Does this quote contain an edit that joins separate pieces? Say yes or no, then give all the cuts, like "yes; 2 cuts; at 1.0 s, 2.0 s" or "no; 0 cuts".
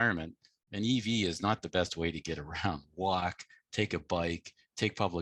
no; 0 cuts